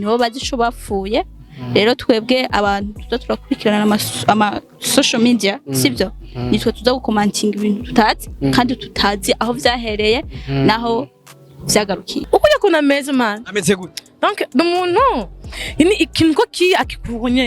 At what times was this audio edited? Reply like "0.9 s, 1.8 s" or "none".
12.1 s

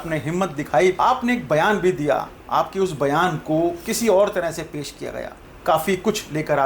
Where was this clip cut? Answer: 1.0 s

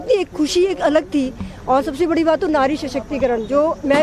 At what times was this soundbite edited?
none

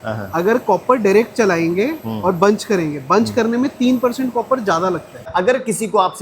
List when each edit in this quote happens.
5.3 s

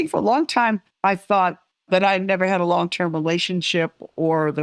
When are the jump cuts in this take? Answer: 0.9 s, 1.7 s

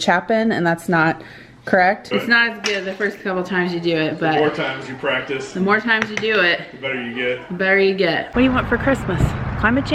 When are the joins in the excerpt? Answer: 2.0 s, 8.3 s

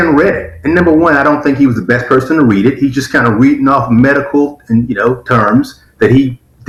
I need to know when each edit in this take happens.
none

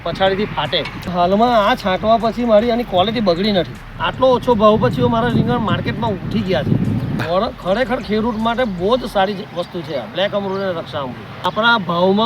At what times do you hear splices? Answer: 1.1 s, 4.0 s, 7.2 s, 11.5 s

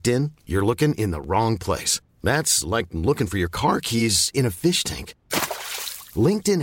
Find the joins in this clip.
none

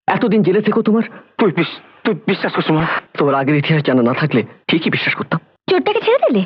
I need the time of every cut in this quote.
4.6 s, 5.5 s

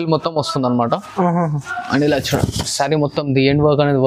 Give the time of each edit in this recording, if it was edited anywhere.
none

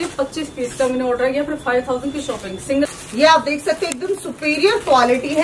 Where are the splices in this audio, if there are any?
2.9 s

